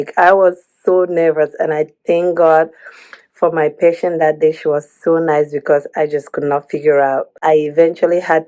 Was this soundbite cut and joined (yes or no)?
yes